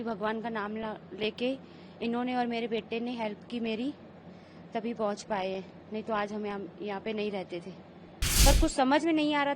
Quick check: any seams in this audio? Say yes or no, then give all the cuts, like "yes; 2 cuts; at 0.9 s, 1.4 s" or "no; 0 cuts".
yes; 1 cut; at 8.1 s